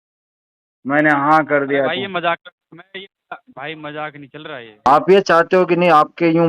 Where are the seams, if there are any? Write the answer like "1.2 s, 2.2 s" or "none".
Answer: 4.9 s